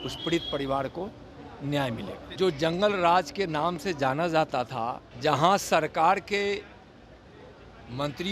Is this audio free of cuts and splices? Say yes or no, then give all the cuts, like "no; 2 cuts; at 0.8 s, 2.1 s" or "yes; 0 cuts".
no; 2 cuts; at 2.3 s, 5.1 s